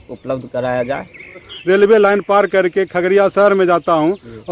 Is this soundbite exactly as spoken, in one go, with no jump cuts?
no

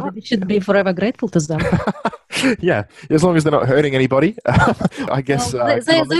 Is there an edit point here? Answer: no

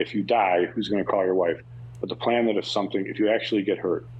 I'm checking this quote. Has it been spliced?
no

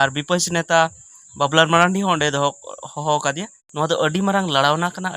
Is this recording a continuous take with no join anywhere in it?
no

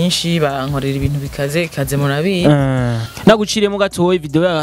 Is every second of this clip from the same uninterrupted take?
no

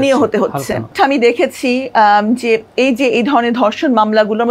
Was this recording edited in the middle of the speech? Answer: yes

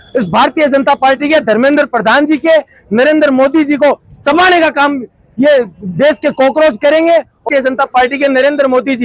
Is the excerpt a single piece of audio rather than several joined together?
no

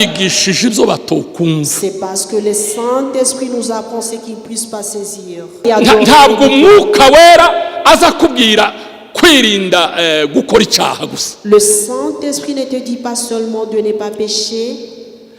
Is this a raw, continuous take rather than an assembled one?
no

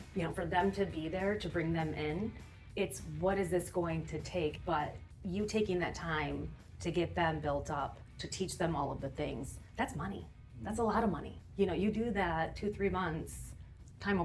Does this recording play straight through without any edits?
no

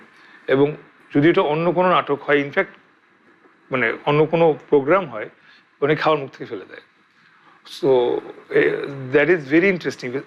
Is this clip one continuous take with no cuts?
yes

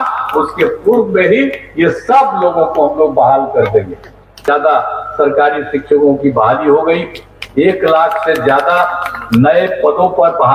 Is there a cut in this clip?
yes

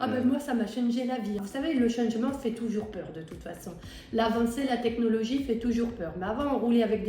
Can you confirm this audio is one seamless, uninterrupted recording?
no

